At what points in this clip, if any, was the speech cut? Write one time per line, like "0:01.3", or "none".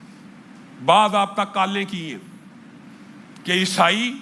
none